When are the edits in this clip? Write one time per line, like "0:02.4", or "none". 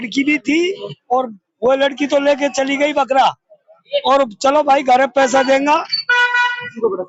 none